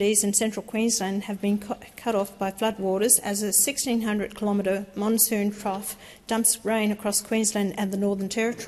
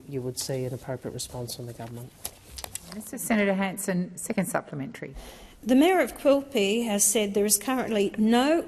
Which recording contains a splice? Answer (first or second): second